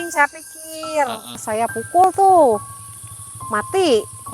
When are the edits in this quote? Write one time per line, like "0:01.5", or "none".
0:01.4